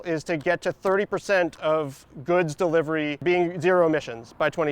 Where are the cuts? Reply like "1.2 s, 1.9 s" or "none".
3.2 s